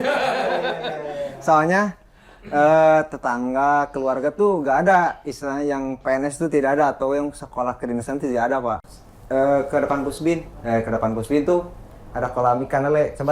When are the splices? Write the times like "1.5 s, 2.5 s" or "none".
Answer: 8.9 s